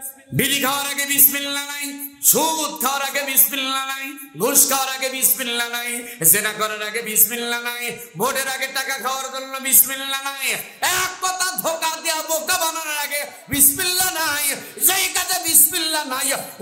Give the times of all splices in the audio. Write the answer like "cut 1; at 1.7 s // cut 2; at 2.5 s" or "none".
none